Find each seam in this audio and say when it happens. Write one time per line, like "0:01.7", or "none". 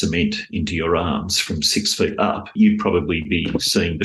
0:02.5